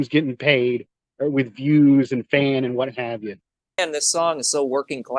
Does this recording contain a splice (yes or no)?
yes